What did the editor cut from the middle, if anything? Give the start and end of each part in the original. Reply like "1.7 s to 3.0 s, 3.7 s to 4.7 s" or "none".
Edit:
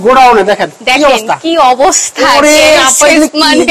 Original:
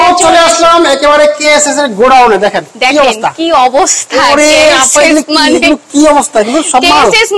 none